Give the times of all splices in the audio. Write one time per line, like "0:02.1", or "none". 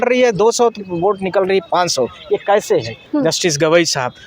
0:03.0